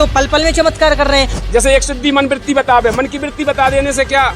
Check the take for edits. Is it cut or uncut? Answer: cut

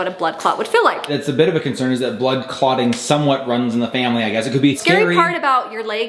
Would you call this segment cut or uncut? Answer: cut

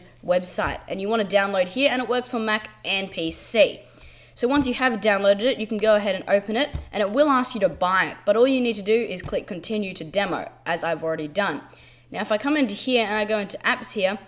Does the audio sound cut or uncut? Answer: uncut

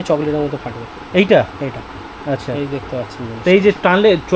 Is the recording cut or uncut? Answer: uncut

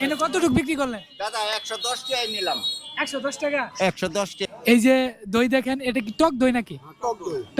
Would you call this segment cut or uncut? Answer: cut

